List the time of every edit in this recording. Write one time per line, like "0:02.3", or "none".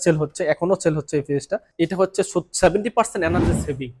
0:01.7